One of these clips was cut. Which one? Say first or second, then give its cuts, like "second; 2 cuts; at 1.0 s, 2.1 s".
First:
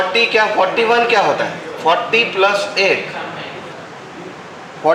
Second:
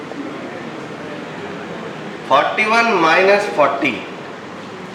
first; 1 cut; at 3.7 s